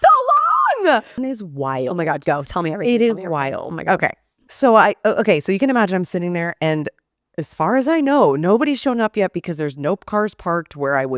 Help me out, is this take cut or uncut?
cut